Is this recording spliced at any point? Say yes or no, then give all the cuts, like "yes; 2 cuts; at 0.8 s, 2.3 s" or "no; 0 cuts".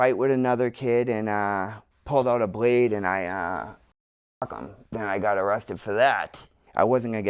no; 0 cuts